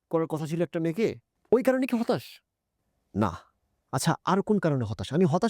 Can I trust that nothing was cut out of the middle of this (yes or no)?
no